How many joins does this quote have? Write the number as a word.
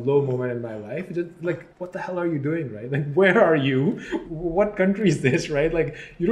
one